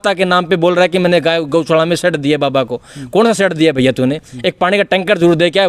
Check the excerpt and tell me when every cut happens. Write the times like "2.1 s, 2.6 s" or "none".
none

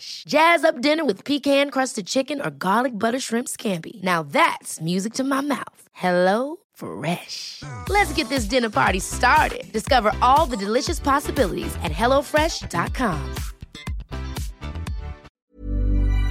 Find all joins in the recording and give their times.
15.2 s

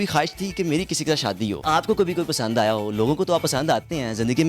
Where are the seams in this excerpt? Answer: 1.6 s

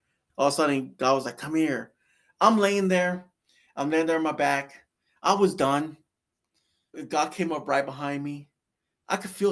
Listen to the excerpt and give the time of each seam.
7.0 s

